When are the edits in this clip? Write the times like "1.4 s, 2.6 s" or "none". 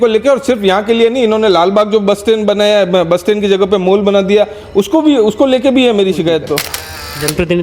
6.7 s

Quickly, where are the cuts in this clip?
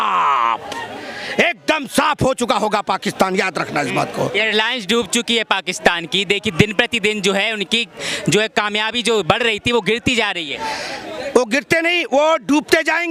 none

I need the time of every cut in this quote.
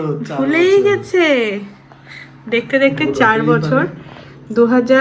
none

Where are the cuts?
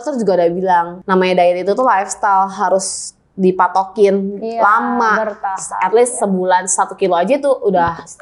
1.0 s

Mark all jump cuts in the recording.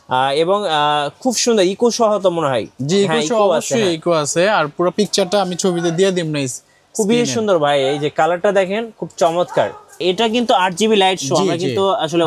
10.0 s

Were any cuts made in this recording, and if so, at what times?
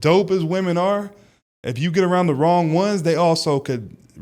none

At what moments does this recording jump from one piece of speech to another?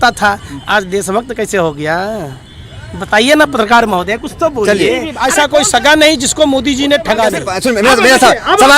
5.1 s, 7.5 s

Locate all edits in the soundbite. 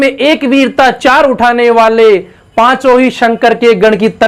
none

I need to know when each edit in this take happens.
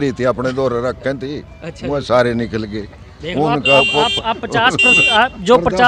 none

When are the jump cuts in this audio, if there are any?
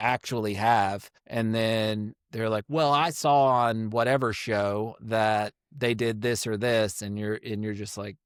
none

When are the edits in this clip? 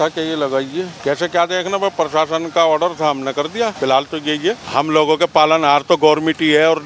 0.9 s, 3.7 s, 4.6 s

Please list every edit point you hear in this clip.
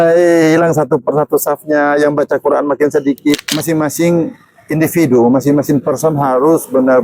3.6 s

